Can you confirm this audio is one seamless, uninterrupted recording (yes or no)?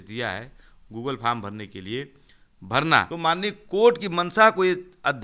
no